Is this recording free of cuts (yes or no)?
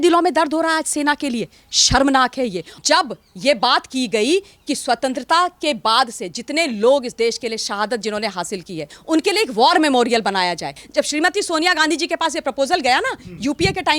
no